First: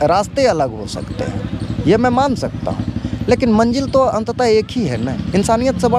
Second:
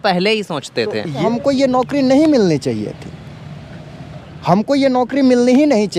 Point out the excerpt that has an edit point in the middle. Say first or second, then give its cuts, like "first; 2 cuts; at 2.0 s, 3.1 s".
second; 1 cut; at 1.2 s